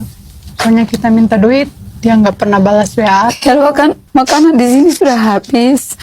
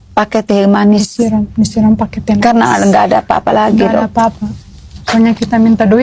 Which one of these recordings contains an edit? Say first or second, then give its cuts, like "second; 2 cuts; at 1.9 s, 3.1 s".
first; 1 cut; at 4.0 s